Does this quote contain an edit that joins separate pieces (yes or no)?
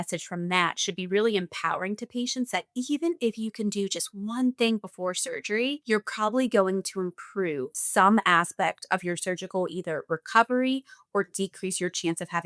yes